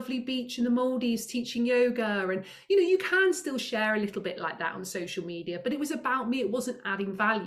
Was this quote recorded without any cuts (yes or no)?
yes